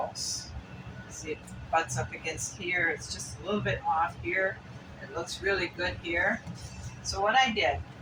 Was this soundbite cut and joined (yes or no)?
no